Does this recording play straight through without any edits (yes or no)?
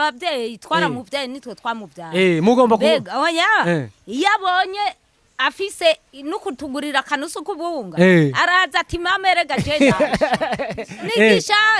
yes